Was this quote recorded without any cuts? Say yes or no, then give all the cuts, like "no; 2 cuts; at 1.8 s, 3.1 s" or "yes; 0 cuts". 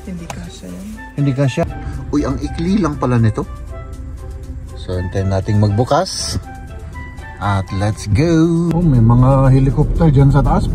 no; 2 cuts; at 1.7 s, 8.7 s